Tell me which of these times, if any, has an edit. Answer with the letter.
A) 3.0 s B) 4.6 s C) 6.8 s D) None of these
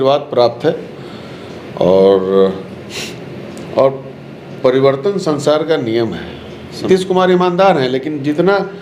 C